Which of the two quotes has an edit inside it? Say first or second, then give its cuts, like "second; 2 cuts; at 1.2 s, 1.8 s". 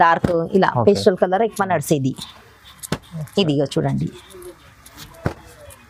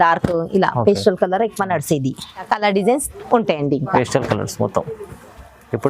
second; 1 cut; at 2.5 s